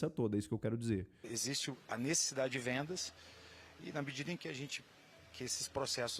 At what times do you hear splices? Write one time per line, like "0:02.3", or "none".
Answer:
0:01.3

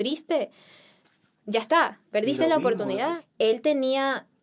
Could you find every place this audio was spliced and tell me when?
0:03.2

